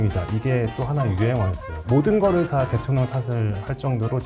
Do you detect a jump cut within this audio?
no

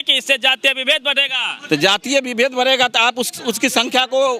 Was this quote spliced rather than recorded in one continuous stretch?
no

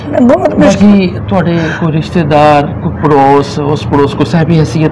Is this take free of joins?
yes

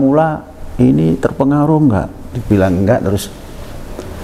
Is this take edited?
no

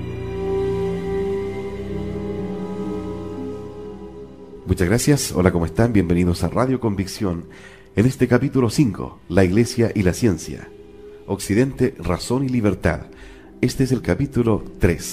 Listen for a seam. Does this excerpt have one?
no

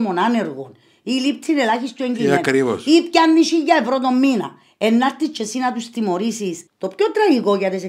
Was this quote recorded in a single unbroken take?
no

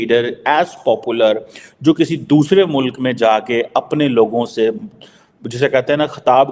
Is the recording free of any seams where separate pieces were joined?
yes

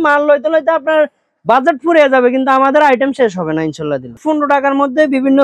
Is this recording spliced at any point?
yes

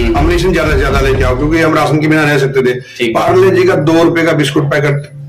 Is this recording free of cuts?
yes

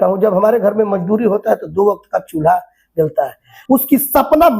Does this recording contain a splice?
yes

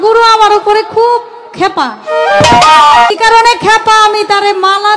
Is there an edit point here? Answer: yes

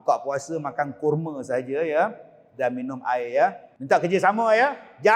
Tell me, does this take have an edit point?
yes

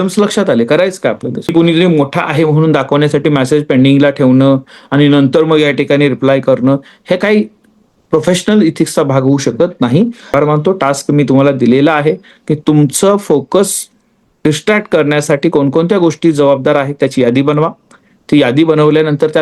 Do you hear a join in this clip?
yes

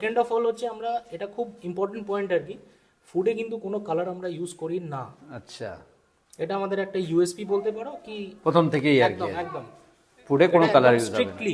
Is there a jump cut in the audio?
no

